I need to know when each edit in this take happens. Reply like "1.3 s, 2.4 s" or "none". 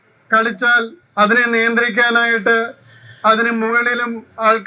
1.0 s